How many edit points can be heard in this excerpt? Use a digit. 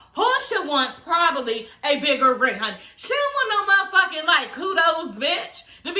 0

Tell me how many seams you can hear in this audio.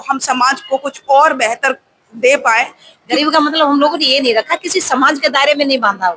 1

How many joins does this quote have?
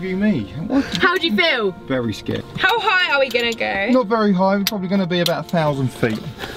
1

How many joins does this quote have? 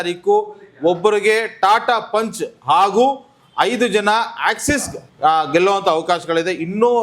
0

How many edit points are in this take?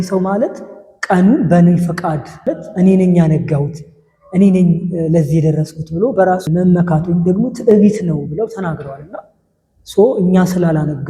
2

